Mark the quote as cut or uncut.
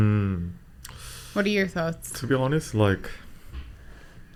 uncut